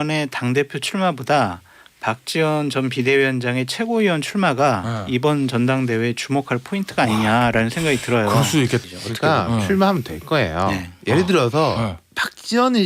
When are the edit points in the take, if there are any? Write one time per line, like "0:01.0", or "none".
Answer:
0:08.8